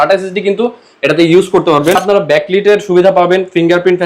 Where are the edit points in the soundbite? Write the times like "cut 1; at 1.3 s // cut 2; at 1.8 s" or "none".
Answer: cut 1; at 2.0 s